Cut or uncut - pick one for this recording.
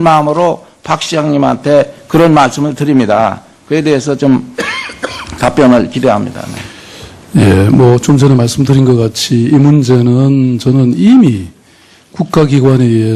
uncut